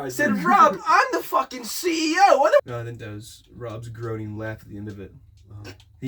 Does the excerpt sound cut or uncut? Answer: cut